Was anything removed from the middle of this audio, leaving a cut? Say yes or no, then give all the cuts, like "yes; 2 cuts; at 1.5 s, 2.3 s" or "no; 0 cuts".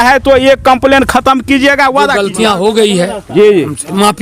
yes; 1 cut; at 2.2 s